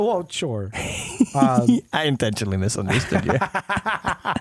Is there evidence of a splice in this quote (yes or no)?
no